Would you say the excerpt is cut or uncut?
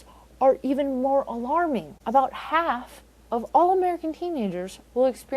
cut